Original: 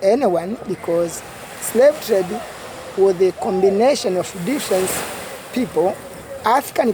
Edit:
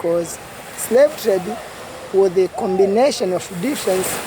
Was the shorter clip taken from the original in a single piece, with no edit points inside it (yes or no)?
yes